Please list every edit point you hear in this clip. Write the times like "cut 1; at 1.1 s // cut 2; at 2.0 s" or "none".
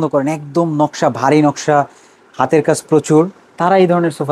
none